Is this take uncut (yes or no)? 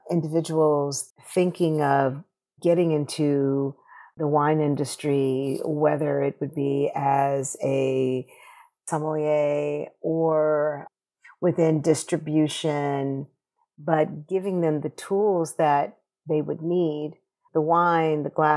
no